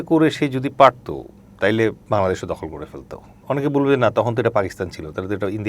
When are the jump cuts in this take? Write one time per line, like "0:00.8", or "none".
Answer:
0:02.0
0:03.4